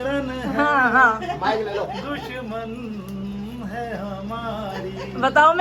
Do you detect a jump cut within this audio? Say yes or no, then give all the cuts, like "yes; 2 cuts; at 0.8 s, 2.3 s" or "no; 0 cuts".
no; 0 cuts